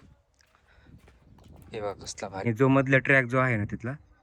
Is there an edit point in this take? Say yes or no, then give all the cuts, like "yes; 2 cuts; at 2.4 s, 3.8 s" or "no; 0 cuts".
yes; 1 cut; at 2.5 s